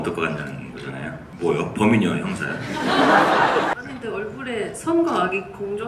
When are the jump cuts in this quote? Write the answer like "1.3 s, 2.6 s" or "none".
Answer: 1.2 s, 3.7 s